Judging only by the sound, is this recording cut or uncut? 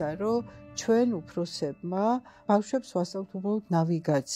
cut